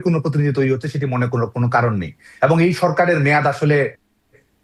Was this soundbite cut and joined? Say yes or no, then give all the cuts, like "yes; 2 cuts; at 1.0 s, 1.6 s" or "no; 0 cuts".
no; 0 cuts